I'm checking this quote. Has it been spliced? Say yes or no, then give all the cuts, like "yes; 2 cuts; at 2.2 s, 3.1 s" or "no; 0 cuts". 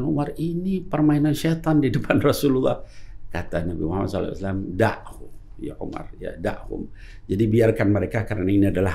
no; 0 cuts